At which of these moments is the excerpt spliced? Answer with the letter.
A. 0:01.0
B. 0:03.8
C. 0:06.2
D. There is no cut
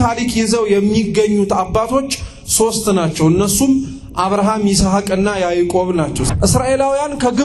C